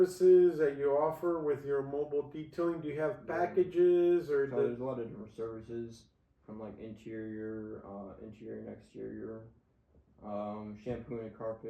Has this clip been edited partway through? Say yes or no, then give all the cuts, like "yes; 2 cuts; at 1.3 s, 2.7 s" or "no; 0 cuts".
no; 0 cuts